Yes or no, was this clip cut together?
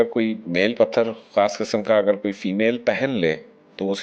no